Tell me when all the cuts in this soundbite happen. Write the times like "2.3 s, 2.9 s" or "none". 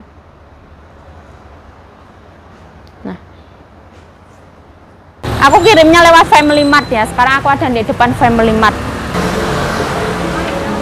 5.2 s, 9.1 s

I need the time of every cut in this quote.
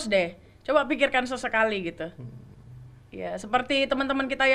none

